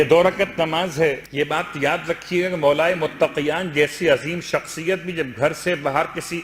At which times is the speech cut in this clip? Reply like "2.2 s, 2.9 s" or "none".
1.2 s